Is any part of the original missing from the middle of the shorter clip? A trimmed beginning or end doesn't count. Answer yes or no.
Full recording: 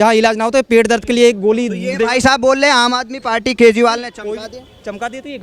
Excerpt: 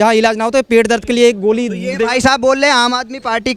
no